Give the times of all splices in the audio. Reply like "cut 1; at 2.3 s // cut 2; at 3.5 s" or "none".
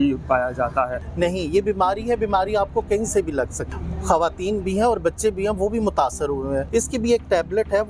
cut 1; at 1.0 s // cut 2; at 3.6 s // cut 3; at 6.7 s